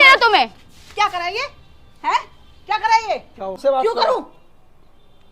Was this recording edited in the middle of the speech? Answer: yes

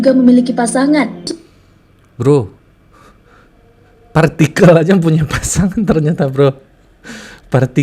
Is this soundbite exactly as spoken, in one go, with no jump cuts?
no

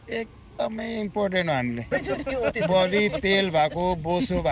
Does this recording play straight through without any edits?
no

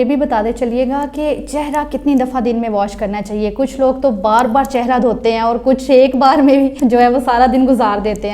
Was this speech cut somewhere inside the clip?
yes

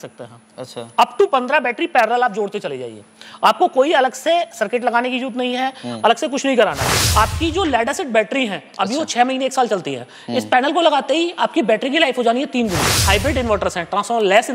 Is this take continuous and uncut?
no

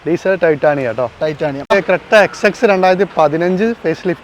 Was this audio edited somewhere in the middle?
yes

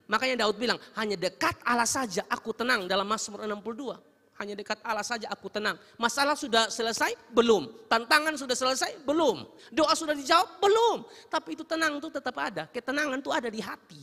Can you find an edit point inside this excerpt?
yes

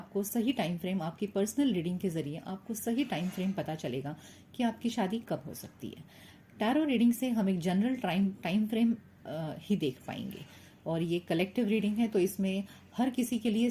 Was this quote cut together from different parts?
no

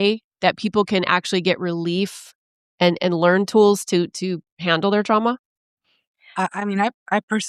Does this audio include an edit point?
no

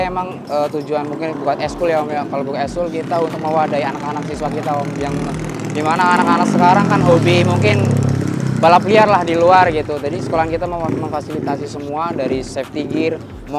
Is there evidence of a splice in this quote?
no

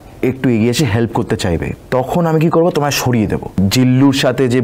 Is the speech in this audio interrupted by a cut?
yes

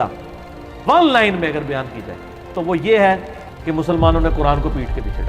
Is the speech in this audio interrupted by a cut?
no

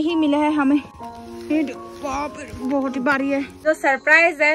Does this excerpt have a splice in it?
yes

